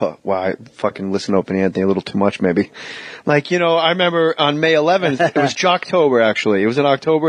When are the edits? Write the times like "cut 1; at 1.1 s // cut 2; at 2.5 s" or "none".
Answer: cut 1; at 4.0 s